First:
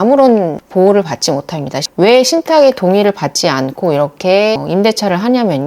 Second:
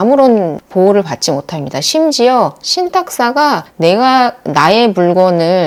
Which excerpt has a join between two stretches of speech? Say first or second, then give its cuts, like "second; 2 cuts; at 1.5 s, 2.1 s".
first; 1 cut; at 1.9 s